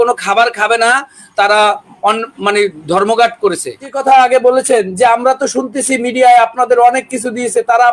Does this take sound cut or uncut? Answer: cut